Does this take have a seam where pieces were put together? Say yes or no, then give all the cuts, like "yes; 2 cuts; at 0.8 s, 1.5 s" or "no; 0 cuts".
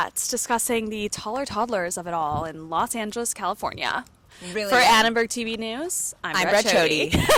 no; 0 cuts